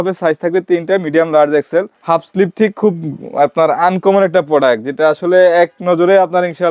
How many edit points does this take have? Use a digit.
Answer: 1